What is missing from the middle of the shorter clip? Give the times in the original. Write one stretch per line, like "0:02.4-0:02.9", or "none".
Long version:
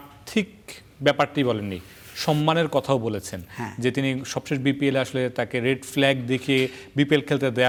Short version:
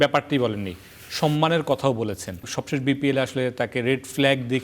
0:03.5-0:04.2